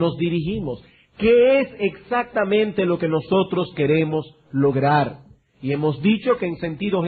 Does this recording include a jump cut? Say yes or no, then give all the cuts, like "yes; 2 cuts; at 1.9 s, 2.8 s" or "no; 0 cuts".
yes; 1 cut; at 1.1 s